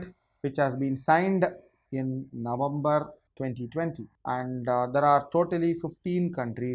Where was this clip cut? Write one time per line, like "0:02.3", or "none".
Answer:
0:03.2
0:04.1